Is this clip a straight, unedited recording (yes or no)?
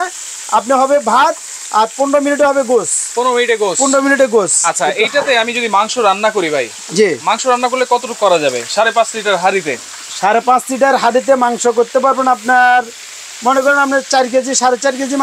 yes